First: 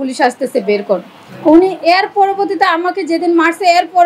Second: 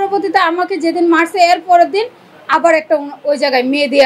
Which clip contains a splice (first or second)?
first